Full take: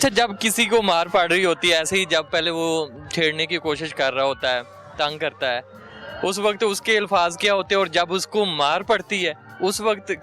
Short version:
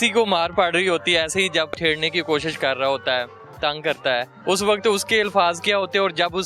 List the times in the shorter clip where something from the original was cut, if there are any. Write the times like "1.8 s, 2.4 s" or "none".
1.7 s, 4.3 s